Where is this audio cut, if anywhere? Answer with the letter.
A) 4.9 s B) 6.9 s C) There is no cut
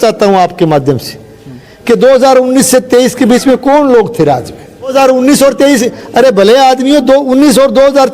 A